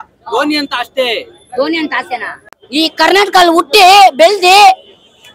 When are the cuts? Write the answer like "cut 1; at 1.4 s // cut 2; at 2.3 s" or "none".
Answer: cut 1; at 2.4 s